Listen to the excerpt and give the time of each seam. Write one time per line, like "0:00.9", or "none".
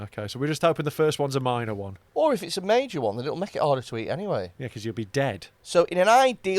0:01.9
0:05.5